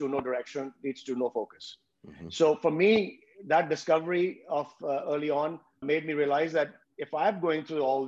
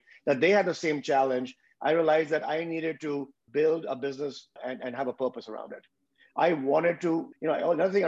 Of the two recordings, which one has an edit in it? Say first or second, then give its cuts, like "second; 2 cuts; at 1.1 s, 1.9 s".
second; 1 cut; at 4.6 s